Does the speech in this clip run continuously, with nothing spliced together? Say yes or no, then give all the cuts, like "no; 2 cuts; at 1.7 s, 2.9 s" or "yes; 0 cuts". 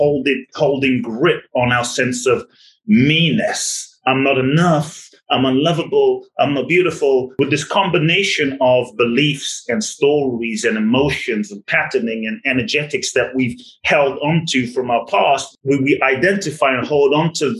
no; 2 cuts; at 7.3 s, 15.5 s